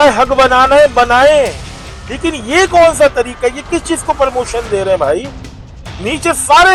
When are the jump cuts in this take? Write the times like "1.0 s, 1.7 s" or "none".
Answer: none